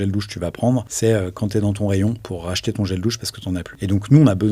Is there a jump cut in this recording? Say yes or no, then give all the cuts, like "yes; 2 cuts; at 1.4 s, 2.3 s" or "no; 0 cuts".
yes; 3 cuts; at 0.9 s, 2.3 s, 3.7 s